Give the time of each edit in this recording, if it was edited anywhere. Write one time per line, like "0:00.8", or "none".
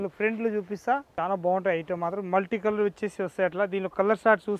0:01.1